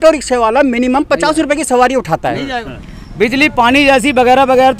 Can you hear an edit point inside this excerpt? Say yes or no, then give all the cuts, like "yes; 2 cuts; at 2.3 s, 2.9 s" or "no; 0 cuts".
yes; 1 cut; at 2.6 s